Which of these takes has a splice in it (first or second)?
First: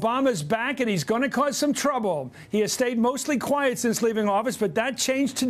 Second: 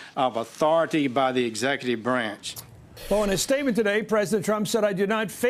first